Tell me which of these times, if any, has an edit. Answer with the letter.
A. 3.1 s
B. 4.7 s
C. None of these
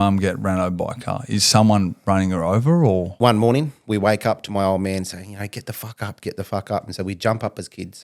A